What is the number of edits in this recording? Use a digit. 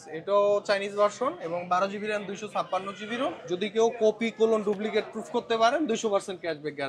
1